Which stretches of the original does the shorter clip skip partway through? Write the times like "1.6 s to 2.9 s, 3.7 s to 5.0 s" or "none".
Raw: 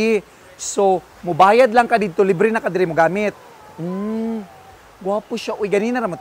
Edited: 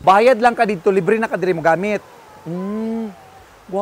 none